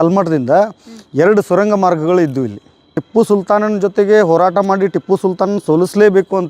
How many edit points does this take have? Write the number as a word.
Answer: one